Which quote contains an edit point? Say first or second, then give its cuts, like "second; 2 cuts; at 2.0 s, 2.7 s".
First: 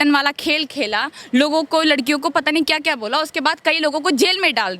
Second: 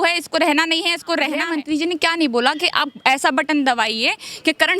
second; 1 cut; at 1.4 s